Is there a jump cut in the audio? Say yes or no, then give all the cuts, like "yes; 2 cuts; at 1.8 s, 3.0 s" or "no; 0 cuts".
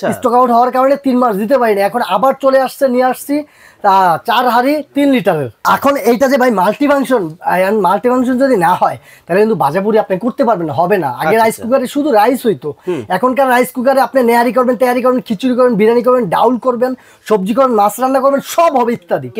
yes; 1 cut; at 5.6 s